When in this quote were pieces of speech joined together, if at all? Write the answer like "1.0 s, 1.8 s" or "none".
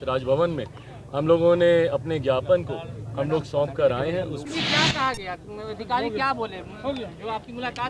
4.4 s